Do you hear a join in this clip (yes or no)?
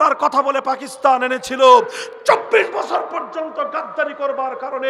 no